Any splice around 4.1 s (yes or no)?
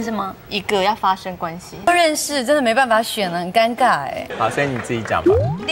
no